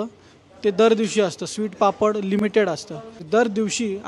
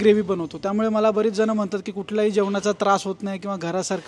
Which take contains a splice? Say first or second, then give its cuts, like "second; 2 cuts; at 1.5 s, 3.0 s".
first; 1 cut; at 3.2 s